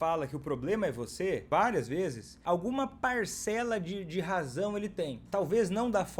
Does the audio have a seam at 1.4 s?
yes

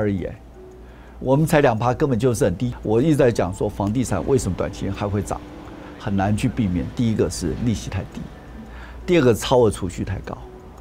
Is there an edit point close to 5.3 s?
no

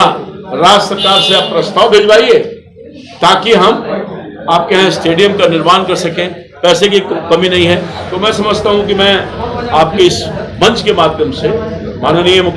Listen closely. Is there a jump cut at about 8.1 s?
yes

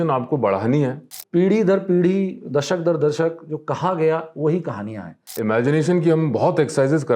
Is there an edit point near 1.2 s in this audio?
yes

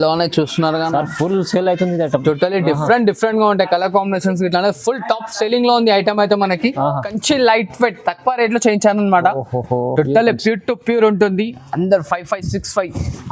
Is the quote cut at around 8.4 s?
no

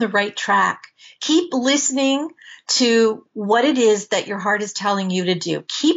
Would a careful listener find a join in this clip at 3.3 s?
yes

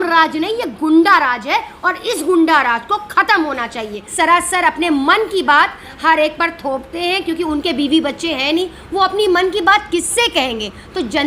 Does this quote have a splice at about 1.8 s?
no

